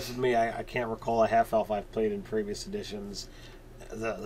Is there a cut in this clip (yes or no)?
yes